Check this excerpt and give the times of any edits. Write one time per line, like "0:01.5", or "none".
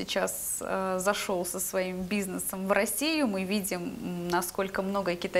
none